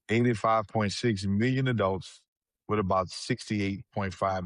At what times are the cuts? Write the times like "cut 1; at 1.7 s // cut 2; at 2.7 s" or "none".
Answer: none